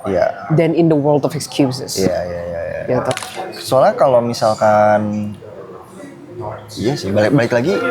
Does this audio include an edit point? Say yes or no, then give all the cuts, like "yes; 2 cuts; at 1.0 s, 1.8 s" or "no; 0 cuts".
yes; 1 cut; at 3.2 s